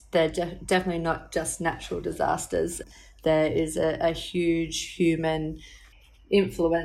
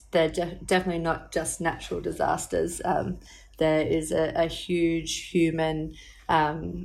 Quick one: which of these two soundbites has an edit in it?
first; 2 cuts; at 2.8 s, 5.8 s

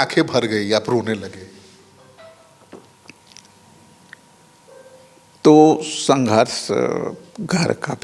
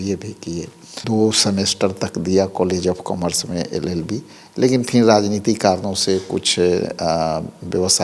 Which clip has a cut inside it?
second; 1 cut; at 1.0 s

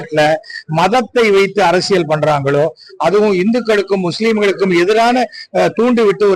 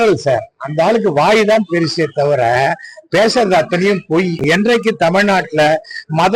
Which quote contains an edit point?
second; 1 cut; at 4.4 s

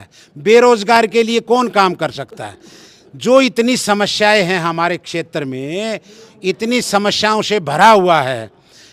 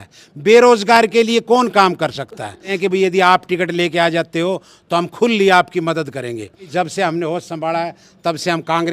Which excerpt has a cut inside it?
second; 2 cuts; at 2.8 s, 6.7 s

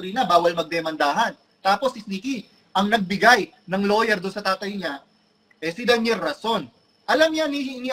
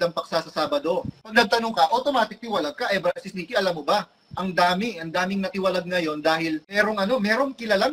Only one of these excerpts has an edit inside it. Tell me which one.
second; 2 cuts; at 1.3 s, 6.7 s

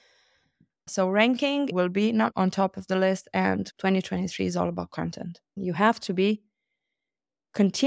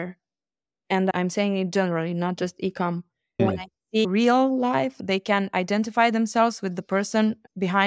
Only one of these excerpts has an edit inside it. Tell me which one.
first; 4 cuts; at 0.9 s, 1.7 s, 3.7 s, 5.6 s

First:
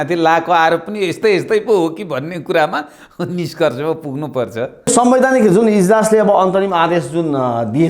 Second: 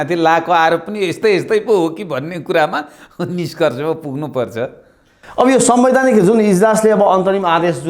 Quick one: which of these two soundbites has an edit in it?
first; 1 cut; at 4.9 s

